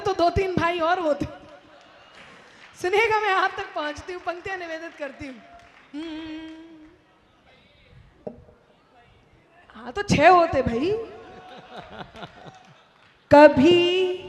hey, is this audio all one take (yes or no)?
yes